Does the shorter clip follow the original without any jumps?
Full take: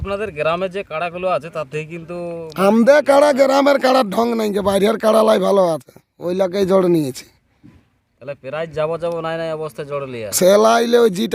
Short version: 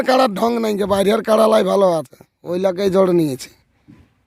yes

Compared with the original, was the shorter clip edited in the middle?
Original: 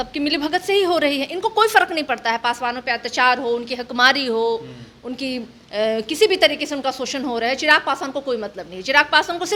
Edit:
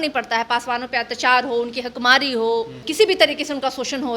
yes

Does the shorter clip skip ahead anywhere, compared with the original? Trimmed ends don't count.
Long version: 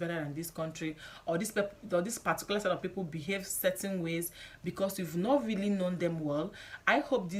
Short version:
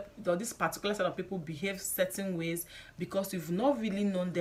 no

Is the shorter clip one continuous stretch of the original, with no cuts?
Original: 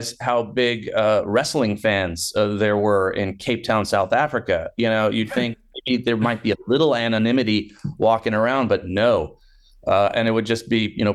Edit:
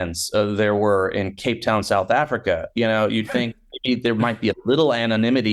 yes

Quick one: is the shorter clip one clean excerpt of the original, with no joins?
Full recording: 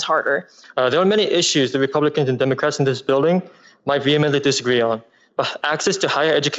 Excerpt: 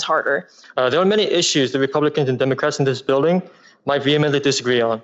yes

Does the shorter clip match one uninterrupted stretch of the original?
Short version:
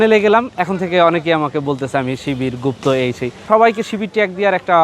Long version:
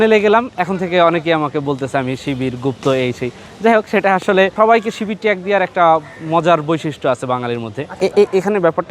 no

